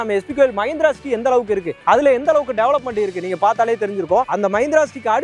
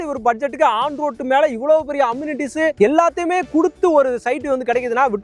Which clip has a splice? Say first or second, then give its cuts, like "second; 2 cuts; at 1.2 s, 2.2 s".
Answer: first; 1 cut; at 4.2 s